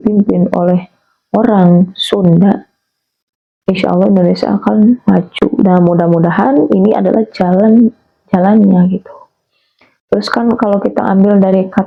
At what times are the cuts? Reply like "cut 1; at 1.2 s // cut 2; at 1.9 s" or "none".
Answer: none